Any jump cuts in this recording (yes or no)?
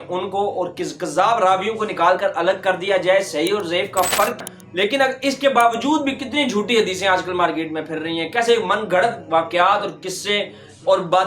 yes